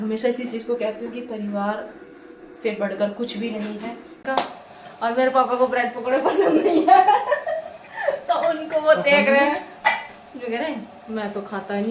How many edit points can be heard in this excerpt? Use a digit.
1